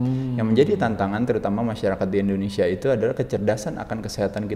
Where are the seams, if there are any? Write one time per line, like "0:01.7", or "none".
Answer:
none

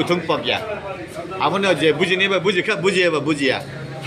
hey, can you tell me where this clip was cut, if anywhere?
none

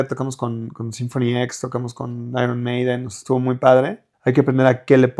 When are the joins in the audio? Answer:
0:04.0

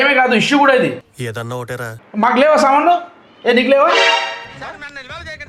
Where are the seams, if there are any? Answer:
0:01.9

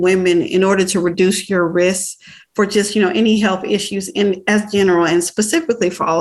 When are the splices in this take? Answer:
none

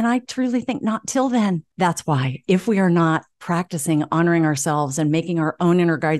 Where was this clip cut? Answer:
0:01.7

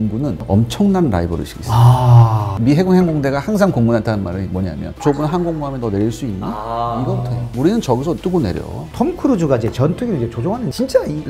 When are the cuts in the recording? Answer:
0:02.5
0:08.9

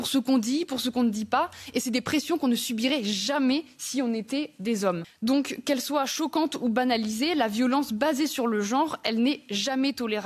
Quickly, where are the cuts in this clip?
none

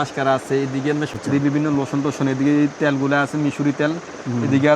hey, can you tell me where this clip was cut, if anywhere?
0:01.1

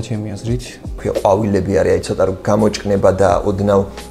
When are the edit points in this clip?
0:01.0

